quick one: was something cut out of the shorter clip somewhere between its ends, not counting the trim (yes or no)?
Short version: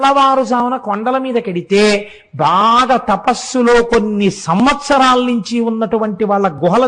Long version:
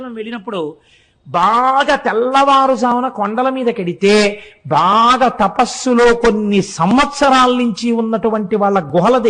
no